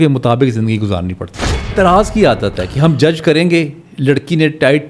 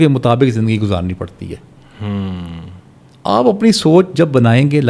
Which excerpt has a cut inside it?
first; 1 cut; at 1.7 s

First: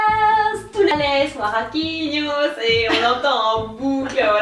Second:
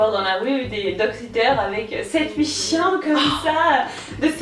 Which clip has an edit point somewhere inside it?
first; 1 cut; at 0.9 s

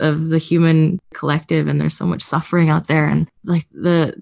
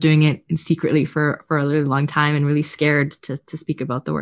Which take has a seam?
first; 2 cuts; at 1.1 s, 3.4 s

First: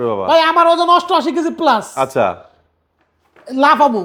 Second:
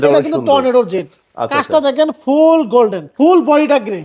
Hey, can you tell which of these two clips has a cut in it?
second; 1 cut; at 3.0 s

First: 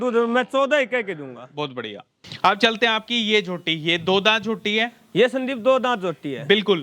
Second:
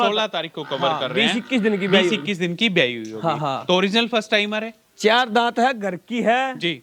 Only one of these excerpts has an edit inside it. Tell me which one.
first; 1 cut; at 2.2 s

